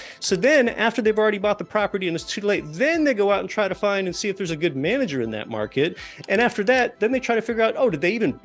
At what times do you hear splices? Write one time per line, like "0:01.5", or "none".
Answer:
0:06.9